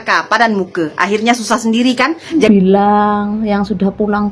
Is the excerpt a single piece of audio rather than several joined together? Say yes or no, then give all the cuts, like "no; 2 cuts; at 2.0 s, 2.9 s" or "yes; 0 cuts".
no; 1 cut; at 2.4 s